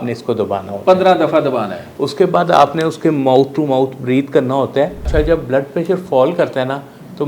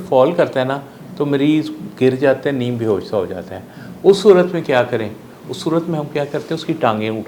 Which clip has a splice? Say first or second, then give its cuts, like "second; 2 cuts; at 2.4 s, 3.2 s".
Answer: first; 1 cut; at 5.1 s